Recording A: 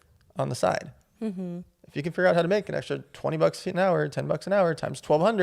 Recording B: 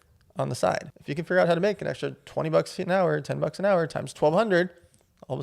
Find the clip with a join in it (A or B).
B